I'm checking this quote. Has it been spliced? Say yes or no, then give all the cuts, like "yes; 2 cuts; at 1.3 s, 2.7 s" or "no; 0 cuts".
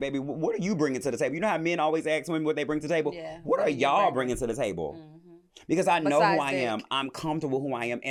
no; 0 cuts